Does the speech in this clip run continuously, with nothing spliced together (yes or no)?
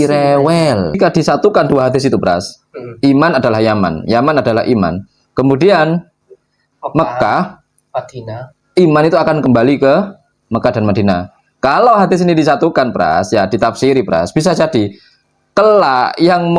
no